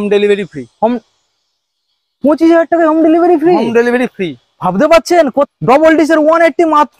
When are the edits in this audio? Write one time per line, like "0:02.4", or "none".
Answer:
0:05.5